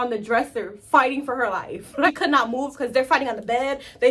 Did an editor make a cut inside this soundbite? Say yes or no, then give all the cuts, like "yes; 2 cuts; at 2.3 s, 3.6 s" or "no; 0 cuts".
yes; 1 cut; at 2.1 s